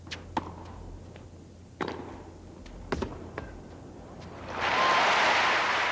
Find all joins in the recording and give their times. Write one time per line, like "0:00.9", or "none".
0:03.6